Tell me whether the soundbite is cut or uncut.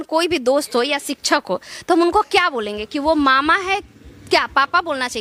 uncut